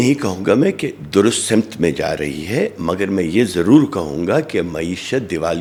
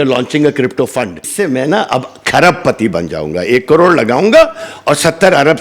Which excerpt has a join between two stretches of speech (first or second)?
second